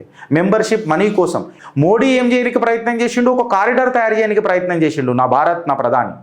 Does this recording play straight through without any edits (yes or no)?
no